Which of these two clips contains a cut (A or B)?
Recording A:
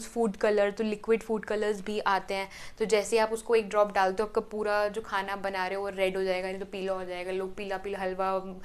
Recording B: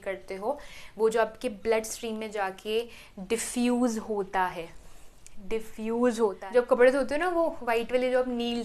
B